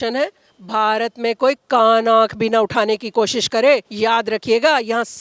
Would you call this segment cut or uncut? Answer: cut